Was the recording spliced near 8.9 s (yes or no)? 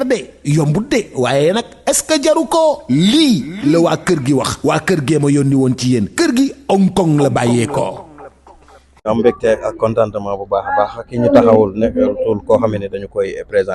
yes